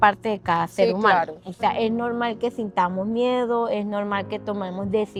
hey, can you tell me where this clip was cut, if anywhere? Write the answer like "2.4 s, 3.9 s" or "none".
none